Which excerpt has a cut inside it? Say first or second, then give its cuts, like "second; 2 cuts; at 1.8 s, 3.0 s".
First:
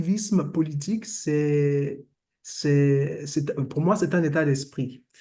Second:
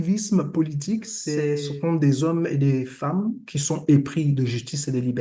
second; 1 cut; at 1.5 s